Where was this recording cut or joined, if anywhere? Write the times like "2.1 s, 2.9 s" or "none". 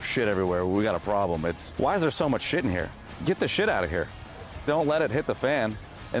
1.7 s, 3.1 s, 4.6 s

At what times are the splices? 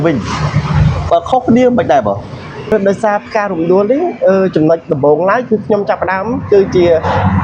2.7 s

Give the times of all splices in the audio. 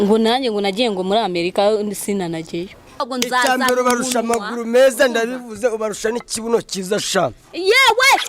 3.1 s

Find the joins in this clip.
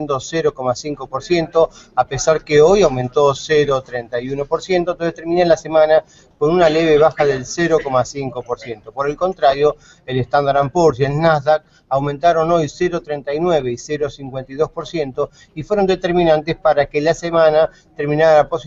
6.2 s

